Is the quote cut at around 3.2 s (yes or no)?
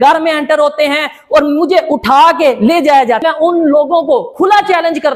yes